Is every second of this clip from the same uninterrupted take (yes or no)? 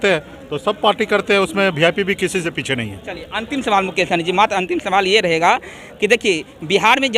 yes